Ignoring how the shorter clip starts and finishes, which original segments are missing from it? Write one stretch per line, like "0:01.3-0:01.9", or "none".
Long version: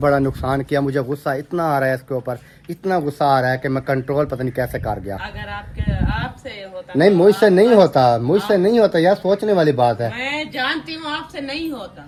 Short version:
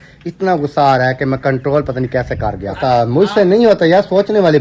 0:05.3-0:08.0